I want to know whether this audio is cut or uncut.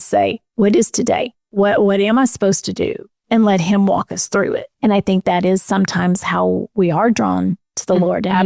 cut